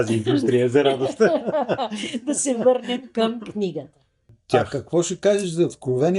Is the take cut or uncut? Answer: cut